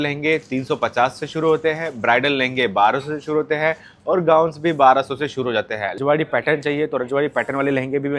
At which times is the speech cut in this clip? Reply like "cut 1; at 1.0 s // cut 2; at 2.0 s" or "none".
cut 1; at 6.0 s